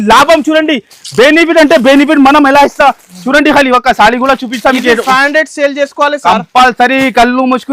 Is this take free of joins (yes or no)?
yes